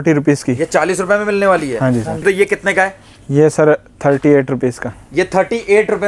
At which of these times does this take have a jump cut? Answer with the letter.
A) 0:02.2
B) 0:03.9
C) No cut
A